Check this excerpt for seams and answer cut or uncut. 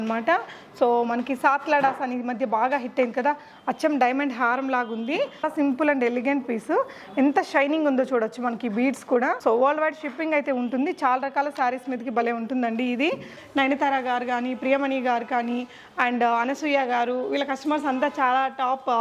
cut